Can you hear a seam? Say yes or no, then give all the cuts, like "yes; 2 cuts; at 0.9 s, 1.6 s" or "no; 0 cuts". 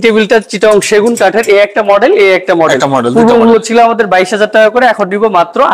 no; 0 cuts